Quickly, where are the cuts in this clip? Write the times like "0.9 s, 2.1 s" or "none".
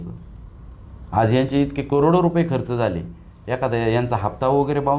none